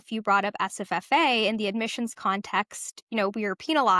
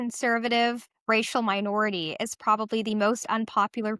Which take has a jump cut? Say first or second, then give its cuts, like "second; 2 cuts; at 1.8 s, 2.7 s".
second; 1 cut; at 0.9 s